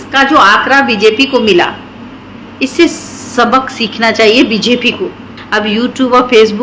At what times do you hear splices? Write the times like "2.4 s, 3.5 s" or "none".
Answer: none

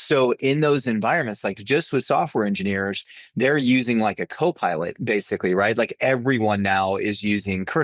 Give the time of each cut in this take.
none

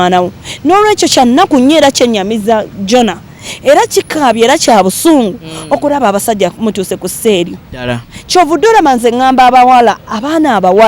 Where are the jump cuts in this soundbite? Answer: none

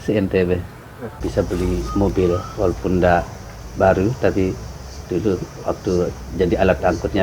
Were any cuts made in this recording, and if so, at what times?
1.1 s

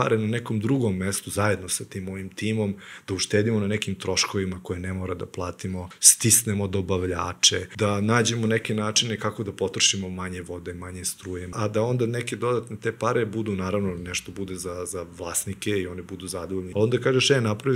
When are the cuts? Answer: 6.0 s, 7.7 s, 11.5 s, 16.7 s

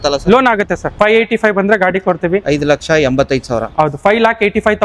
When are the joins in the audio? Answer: 0.9 s

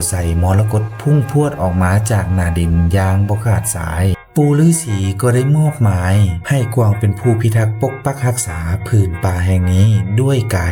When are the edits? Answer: 4.2 s

